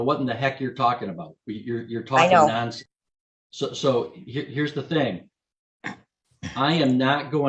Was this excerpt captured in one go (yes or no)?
yes